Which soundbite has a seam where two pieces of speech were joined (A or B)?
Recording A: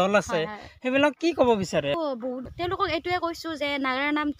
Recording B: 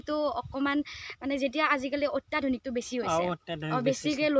A